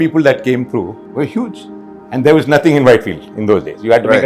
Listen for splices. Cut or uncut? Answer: cut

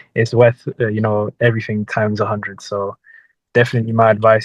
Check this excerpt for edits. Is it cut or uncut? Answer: uncut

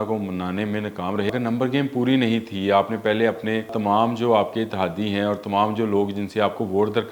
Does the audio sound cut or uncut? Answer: cut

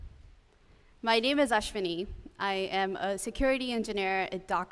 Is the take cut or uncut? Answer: cut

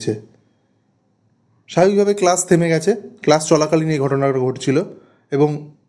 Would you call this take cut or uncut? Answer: uncut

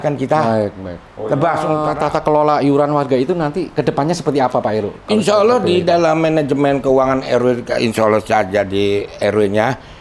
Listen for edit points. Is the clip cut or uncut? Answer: cut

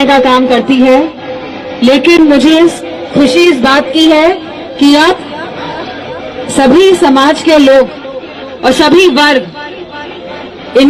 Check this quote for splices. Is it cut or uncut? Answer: uncut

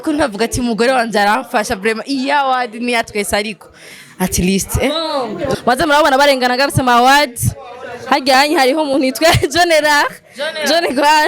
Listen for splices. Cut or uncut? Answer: cut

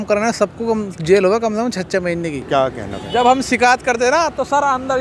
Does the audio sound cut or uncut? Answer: cut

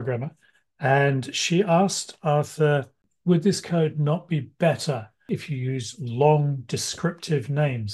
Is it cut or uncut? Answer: cut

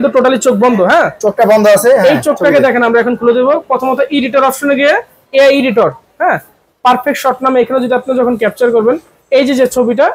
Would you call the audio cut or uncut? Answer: uncut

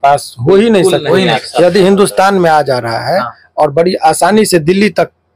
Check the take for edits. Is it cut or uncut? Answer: cut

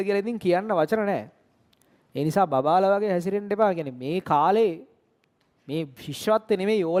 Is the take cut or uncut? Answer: uncut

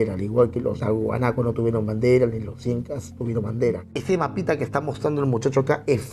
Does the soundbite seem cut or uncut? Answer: cut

